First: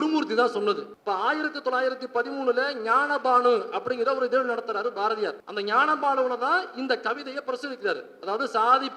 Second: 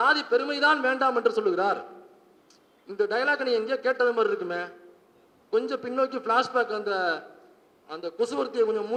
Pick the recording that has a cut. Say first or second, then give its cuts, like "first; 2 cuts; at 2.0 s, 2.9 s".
first; 2 cuts; at 0.9 s, 5.4 s